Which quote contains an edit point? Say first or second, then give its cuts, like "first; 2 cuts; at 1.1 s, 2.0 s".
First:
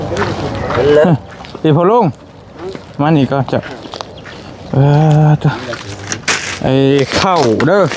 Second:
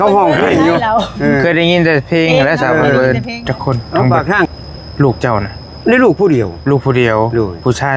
second; 1 cut; at 4.5 s